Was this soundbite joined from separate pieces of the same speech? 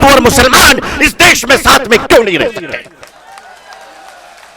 no; 0 cuts

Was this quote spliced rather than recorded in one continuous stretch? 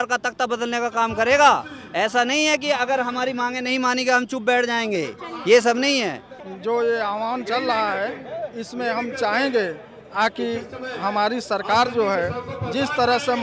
no; 0 cuts

